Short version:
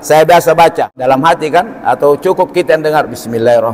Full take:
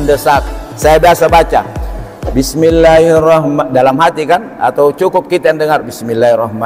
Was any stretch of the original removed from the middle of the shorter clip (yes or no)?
yes